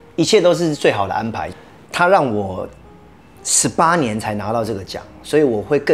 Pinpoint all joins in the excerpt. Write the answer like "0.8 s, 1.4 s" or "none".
1.4 s